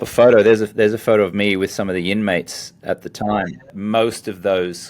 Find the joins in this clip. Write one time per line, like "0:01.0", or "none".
0:03.7